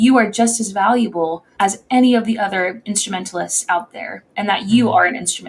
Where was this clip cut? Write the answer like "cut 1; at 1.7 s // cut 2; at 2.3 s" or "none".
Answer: none